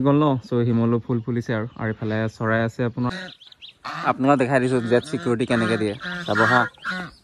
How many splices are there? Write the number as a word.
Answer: one